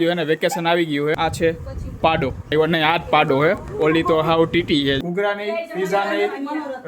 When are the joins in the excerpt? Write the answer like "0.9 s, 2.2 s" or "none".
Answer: 1.2 s, 2.5 s, 5.0 s

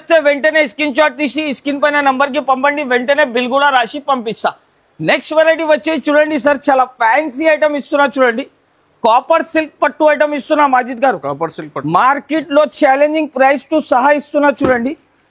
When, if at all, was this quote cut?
none

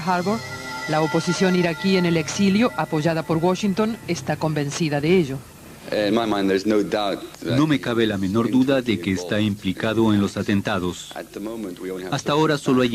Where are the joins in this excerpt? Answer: 1.8 s

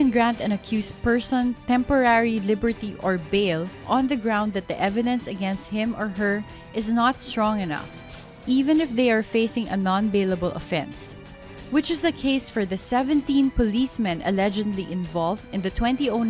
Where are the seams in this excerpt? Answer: 6.1 s

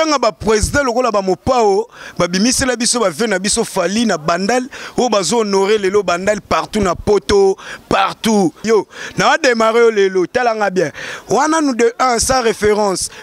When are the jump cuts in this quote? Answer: 8.6 s

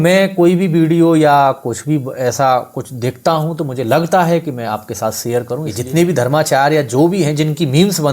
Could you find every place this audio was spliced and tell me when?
5.7 s

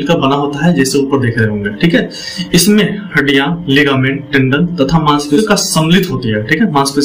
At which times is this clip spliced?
5.4 s

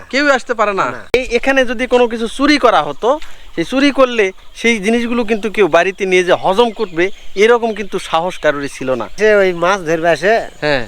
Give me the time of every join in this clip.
1.1 s, 9.2 s

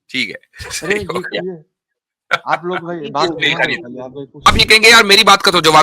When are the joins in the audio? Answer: 4.5 s

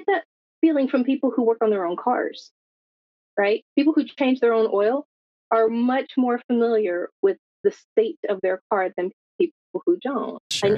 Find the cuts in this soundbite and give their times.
none

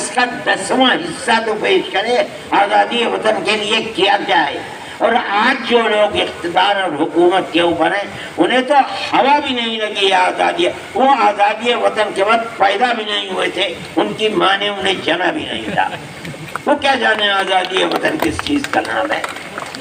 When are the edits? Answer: none

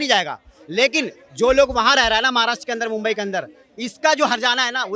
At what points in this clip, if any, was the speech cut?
none

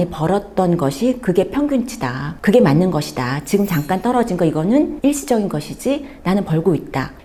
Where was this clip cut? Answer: none

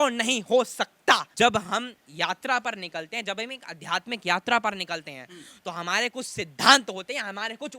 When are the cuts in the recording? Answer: 1.3 s

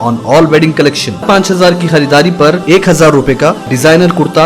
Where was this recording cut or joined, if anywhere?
1.2 s

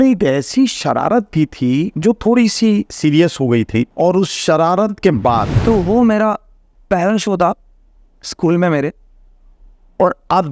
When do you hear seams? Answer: 1.9 s, 3.9 s, 5.5 s

